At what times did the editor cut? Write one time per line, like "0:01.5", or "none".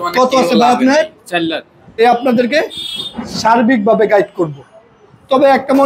0:01.8